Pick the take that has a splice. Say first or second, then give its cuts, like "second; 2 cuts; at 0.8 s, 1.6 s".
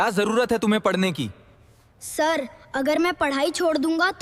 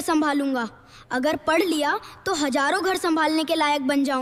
first; 1 cut; at 1.8 s